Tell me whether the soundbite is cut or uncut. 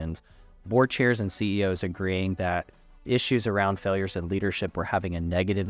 uncut